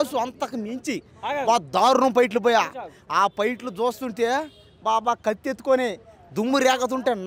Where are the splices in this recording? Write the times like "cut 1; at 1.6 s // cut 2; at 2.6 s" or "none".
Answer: none

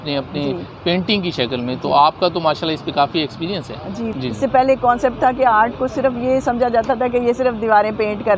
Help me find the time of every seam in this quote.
cut 1; at 4.1 s

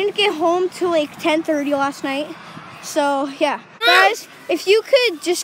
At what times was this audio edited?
cut 1; at 3.8 s

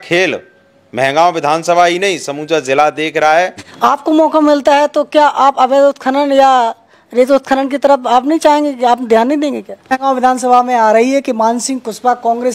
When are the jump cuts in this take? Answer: cut 1; at 3.6 s // cut 2; at 10.0 s

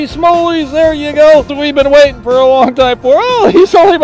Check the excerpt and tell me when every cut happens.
cut 1; at 1.6 s

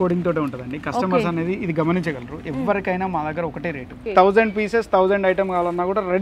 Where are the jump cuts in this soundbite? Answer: cut 1; at 4.0 s

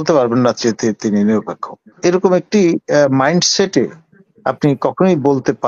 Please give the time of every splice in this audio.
cut 1; at 1.9 s

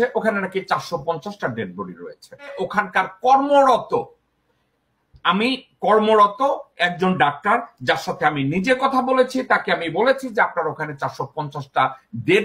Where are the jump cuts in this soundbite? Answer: cut 1; at 2.5 s

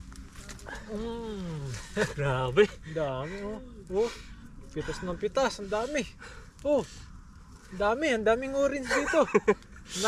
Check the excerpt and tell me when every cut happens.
none

